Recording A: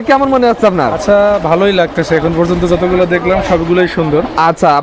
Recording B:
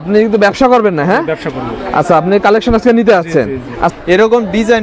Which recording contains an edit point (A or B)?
B